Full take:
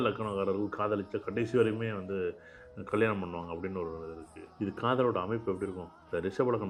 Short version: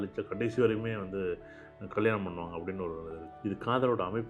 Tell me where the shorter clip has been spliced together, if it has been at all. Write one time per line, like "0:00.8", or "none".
0:03.2

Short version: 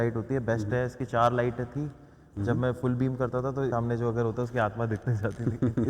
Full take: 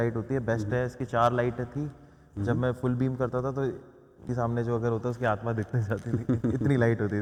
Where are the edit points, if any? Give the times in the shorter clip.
0:03.7

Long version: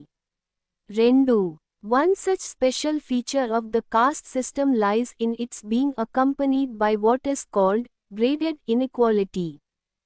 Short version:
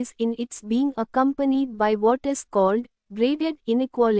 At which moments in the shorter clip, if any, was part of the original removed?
none

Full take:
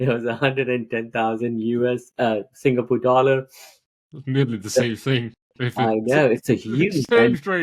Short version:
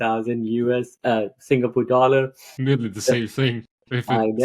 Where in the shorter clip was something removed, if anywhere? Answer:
0:02.4

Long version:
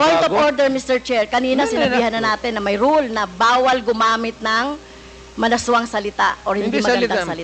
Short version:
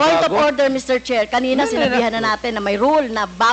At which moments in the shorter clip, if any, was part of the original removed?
none

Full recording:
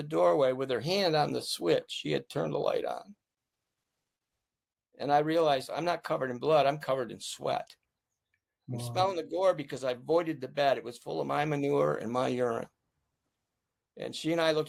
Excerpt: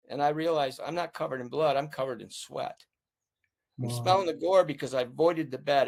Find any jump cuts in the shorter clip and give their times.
none

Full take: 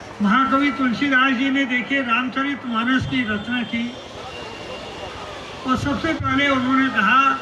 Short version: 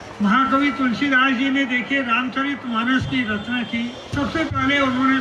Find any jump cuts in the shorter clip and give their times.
0:04.1

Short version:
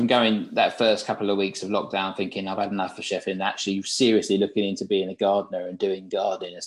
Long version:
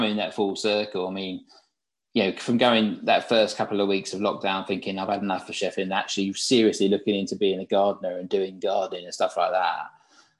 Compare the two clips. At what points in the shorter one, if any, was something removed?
none

